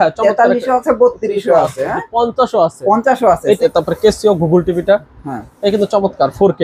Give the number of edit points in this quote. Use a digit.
1